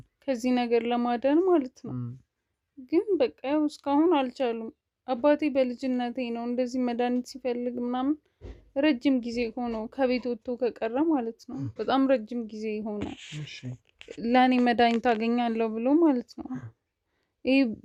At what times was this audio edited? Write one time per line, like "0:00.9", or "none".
none